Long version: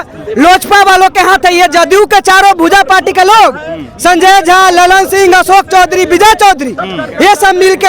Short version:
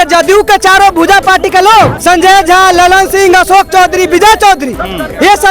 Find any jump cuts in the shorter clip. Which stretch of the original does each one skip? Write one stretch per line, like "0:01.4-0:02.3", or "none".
0:03.6-0:03.9